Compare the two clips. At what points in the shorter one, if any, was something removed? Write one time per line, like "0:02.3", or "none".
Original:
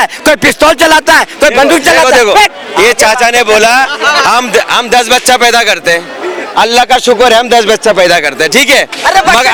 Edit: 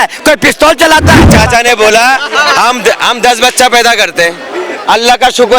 0:01.3